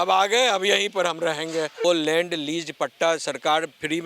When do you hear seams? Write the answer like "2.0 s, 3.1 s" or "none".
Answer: 1.8 s